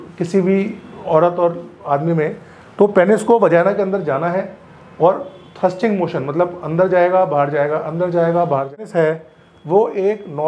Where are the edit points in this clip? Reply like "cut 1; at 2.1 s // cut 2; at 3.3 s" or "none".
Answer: cut 1; at 8.8 s